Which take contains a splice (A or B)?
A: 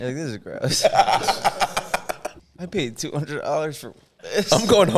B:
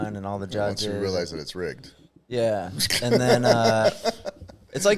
A